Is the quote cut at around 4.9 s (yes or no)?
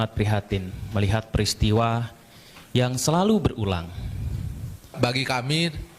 yes